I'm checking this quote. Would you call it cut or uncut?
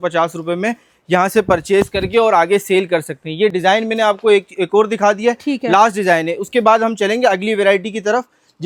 uncut